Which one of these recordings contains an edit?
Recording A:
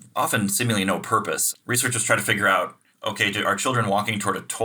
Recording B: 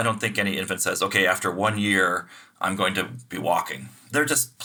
A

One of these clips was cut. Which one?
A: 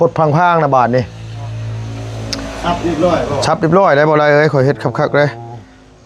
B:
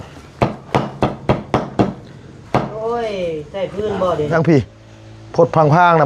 B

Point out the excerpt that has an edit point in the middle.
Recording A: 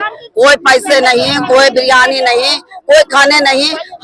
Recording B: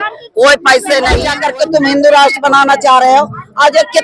B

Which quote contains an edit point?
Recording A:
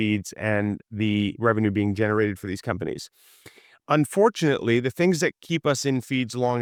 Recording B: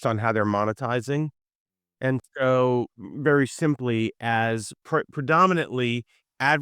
B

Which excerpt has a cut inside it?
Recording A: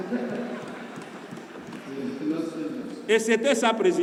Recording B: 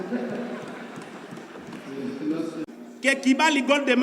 B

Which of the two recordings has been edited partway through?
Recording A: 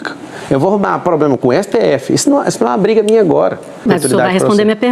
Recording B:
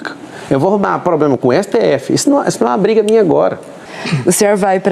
A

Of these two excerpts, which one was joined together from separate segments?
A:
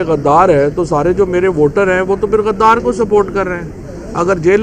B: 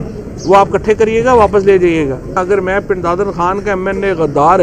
B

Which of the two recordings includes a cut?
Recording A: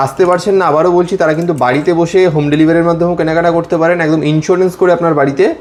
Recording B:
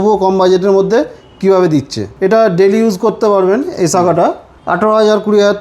B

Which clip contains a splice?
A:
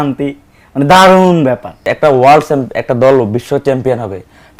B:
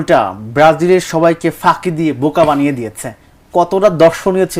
A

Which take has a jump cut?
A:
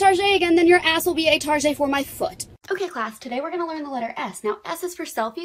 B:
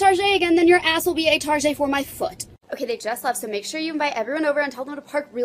B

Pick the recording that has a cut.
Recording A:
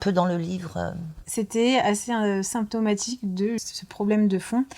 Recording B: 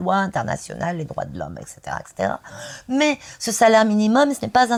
A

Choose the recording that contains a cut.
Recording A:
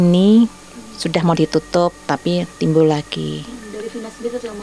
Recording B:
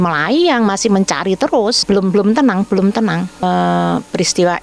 B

